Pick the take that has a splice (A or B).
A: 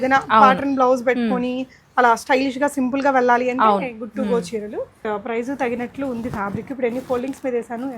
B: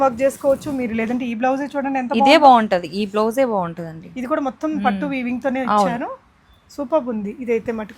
A